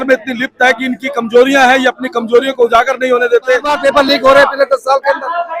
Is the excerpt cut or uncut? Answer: cut